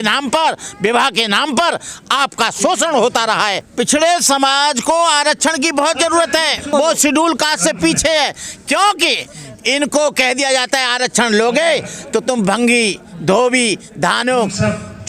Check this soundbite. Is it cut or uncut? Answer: cut